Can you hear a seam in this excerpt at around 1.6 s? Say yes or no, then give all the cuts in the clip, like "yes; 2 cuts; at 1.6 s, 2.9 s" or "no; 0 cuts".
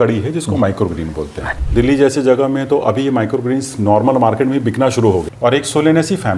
yes; 2 cuts; at 1.6 s, 5.3 s